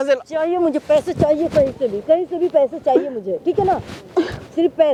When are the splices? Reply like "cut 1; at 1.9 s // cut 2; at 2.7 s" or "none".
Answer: none